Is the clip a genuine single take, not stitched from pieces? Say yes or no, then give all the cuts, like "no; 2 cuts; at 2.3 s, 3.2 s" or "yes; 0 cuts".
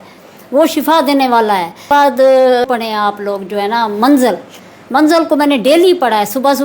no; 2 cuts; at 1.9 s, 2.7 s